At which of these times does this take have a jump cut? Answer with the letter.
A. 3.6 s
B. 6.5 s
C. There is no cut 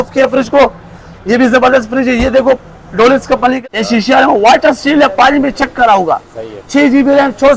A